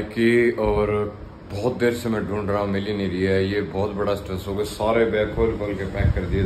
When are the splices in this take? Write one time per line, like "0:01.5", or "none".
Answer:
none